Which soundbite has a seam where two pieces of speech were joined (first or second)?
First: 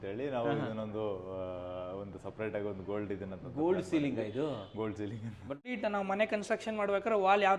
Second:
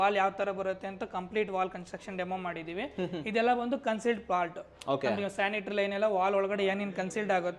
first